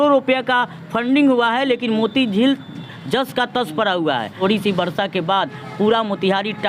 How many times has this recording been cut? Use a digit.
1